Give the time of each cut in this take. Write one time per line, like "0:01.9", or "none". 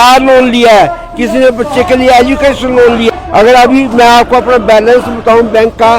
0:03.1

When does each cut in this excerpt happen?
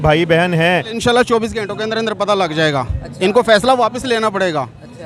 0:00.9

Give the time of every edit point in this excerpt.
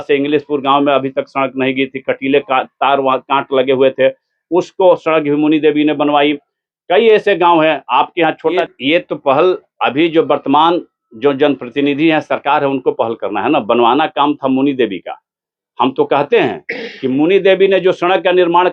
0:08.6

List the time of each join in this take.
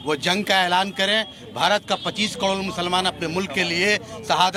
none

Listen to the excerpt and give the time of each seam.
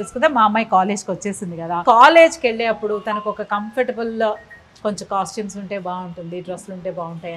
0:01.8

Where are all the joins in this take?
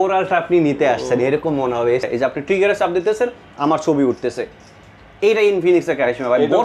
0:02.0

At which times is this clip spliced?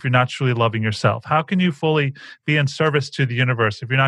none

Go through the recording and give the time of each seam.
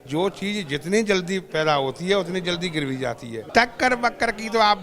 0:03.3

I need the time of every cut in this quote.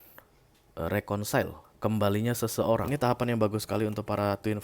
0:02.8

